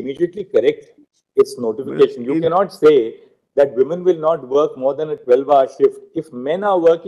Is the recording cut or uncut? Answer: uncut